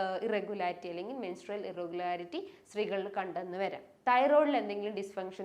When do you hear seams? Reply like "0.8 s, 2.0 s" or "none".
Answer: 3.9 s